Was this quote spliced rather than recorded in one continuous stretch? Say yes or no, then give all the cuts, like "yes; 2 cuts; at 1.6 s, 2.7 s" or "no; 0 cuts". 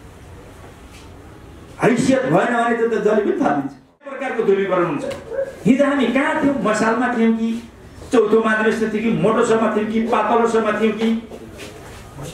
yes; 1 cut; at 4.2 s